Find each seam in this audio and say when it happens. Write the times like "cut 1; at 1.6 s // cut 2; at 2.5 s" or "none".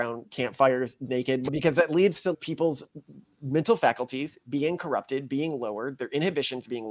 cut 1; at 1.4 s // cut 2; at 2.4 s